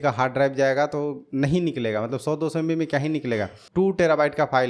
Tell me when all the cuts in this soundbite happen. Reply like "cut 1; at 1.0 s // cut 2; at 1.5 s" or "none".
cut 1; at 3.6 s